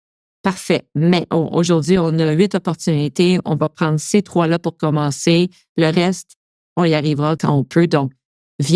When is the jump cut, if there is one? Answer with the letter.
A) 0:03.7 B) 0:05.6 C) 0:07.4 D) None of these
C